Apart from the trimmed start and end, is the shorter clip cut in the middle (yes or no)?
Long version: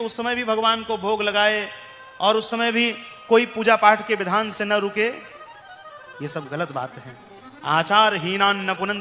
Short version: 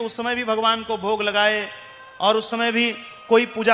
no